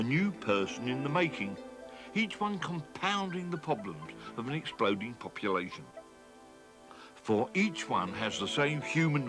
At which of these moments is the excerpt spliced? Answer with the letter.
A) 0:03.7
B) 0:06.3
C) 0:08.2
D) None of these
C